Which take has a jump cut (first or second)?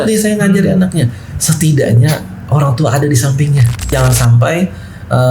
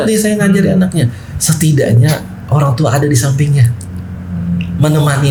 first